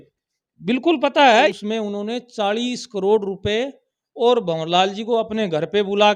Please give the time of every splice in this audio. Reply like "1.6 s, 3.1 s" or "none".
1.6 s

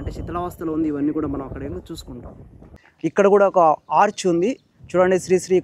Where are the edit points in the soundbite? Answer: 2.7 s

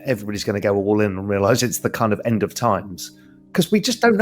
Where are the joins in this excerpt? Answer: 2.5 s

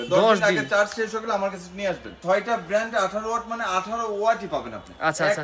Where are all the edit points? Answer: 2.1 s

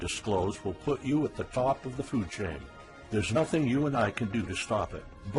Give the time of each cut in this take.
none

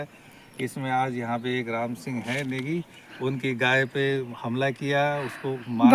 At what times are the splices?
none

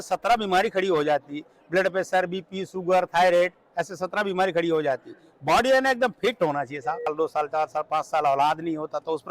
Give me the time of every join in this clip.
7.1 s

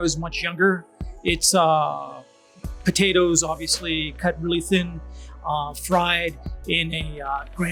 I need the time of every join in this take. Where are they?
none

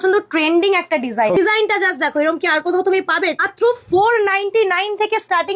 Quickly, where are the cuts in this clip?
1.4 s, 3.4 s

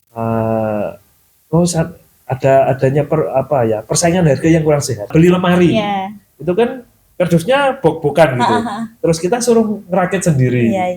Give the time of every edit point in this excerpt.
5.1 s

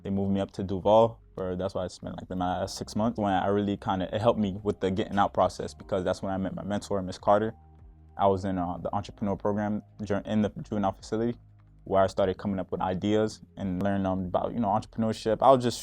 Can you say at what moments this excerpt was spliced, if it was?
3.2 s, 13.8 s

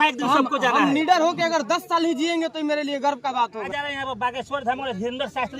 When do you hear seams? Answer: 3.7 s

